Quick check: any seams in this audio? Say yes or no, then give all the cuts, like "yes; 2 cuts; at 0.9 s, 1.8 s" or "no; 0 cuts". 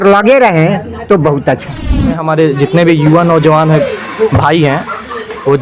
yes; 1 cut; at 2.2 s